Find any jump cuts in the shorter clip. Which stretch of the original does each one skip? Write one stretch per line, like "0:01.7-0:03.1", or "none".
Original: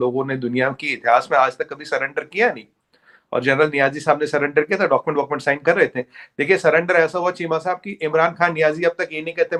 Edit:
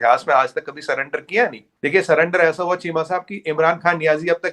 0:02.7-0:06.2